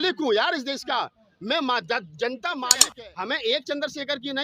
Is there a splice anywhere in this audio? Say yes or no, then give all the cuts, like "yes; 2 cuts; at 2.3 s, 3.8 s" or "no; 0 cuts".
yes; 1 cut; at 2.8 s